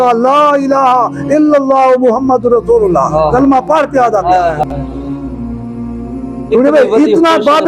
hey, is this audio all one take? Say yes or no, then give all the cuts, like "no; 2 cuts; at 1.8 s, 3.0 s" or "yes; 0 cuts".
yes; 0 cuts